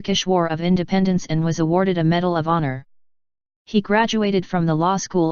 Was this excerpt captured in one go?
yes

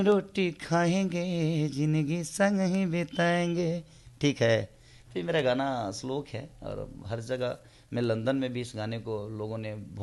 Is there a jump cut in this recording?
no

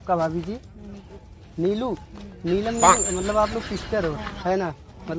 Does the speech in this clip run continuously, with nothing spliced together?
yes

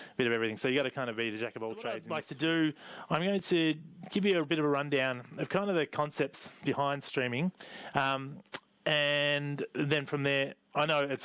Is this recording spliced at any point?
yes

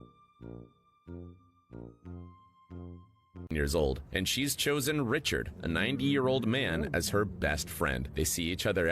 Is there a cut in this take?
yes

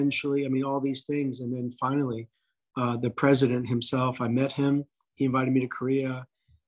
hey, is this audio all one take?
yes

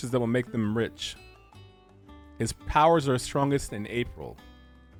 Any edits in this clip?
no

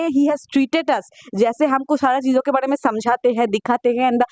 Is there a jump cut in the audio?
no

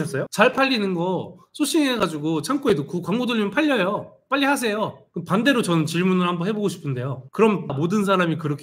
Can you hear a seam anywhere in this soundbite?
yes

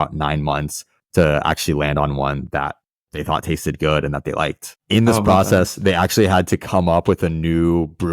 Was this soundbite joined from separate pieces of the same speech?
yes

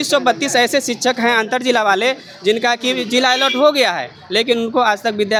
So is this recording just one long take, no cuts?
yes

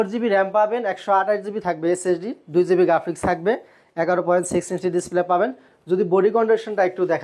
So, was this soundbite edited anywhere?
no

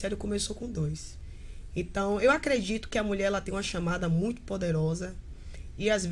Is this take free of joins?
no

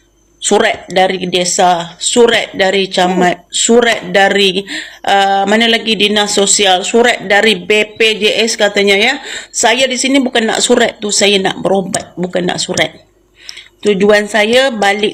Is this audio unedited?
yes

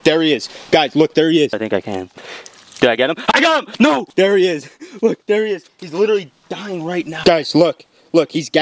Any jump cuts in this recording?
yes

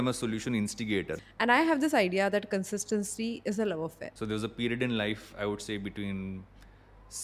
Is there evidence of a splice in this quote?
yes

